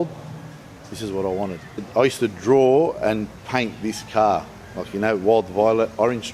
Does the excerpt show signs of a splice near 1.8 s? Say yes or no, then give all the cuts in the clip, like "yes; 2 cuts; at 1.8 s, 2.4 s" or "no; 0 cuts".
yes; 2 cuts; at 1.8 s, 3.4 s